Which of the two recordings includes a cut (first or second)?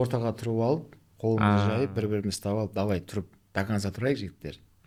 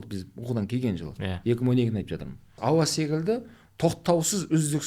second